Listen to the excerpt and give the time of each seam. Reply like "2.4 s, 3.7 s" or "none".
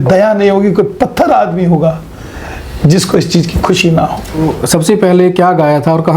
4.4 s